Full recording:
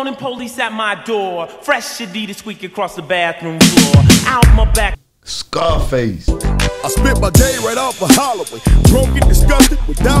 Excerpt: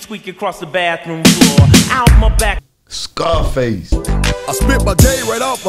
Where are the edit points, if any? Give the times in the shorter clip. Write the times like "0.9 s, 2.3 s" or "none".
none